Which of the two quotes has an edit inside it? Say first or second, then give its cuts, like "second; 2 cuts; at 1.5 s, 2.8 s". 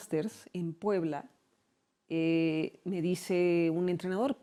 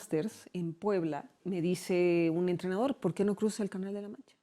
second; 1 cut; at 1.4 s